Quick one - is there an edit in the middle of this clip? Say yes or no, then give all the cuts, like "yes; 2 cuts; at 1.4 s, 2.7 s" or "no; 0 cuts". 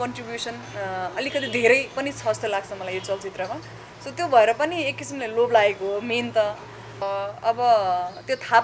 yes; 1 cut; at 7.0 s